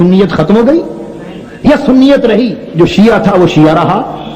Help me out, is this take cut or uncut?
cut